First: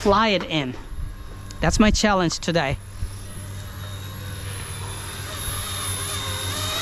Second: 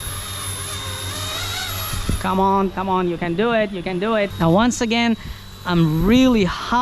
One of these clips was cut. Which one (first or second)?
second